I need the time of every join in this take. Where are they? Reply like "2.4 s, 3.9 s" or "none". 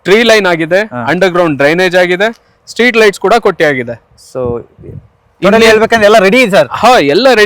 none